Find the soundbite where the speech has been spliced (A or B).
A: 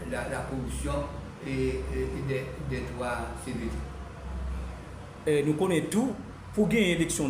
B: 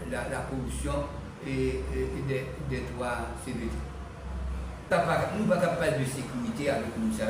B